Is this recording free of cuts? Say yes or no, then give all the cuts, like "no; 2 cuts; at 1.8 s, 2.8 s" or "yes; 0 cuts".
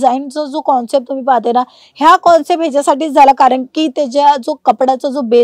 yes; 0 cuts